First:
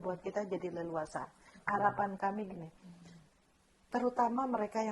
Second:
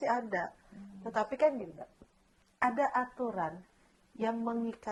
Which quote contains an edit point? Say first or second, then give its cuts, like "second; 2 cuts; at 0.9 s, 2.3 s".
first; 1 cut; at 1.6 s